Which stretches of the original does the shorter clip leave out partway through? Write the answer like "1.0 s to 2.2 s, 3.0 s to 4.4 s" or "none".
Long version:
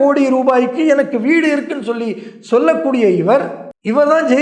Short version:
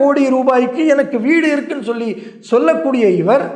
none

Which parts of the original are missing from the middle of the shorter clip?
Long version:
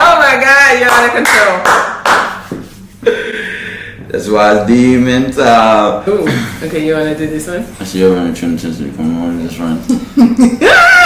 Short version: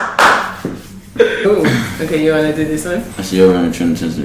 3.3 s to 6.0 s

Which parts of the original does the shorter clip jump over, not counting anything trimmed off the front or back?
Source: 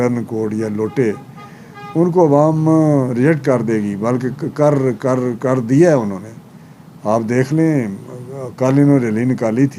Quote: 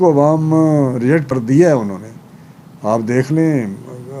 3.4 s to 5.5 s

